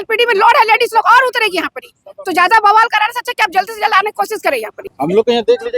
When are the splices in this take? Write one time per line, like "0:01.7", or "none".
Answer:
0:04.8